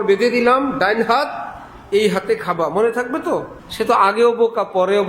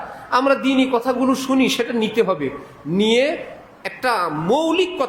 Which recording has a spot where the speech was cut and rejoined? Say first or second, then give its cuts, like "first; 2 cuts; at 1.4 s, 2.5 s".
first; 1 cut; at 3.6 s